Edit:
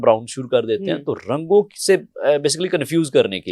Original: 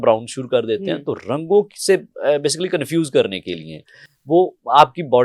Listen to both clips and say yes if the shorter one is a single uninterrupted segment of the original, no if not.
yes